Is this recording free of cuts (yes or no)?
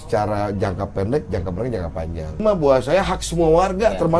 no